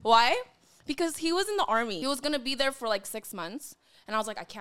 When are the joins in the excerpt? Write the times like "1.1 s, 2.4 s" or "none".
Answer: 2.0 s